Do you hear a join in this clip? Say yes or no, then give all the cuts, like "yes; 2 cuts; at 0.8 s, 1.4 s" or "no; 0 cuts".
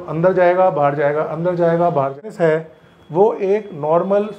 yes; 1 cut; at 2.2 s